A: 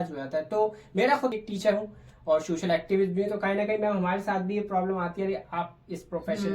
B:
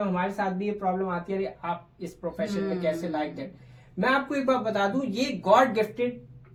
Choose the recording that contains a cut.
A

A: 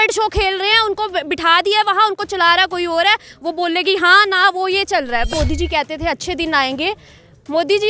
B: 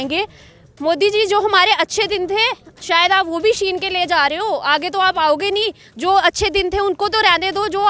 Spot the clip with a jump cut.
A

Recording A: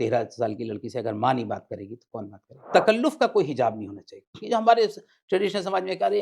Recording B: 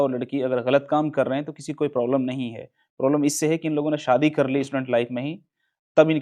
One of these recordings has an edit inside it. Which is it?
A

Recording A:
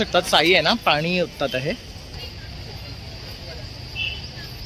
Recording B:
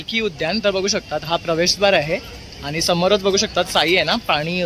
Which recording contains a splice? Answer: A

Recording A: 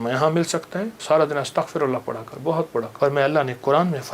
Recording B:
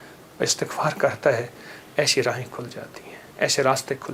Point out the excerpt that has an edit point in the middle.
A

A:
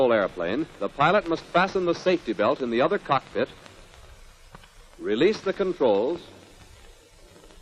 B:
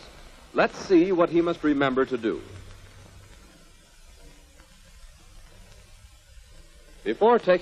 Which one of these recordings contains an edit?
A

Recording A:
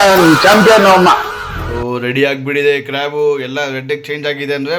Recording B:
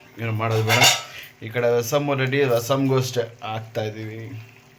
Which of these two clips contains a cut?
A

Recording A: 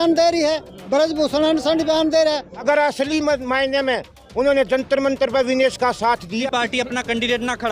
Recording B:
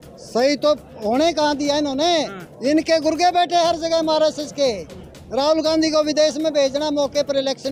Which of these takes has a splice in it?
A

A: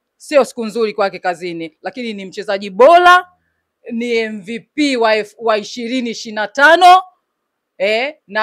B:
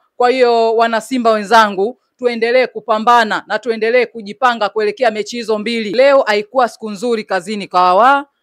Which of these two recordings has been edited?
B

